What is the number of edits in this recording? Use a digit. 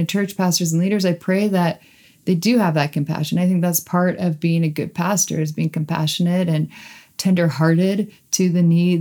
0